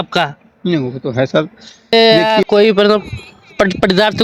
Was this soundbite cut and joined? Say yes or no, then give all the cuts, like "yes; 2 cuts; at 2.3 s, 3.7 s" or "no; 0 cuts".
yes; 1 cut; at 1.9 s